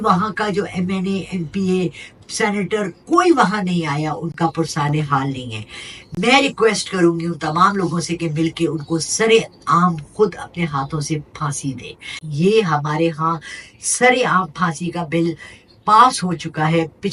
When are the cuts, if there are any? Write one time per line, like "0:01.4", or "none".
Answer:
none